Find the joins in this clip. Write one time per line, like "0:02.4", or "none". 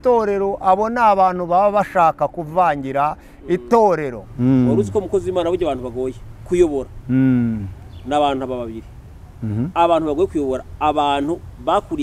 0:04.2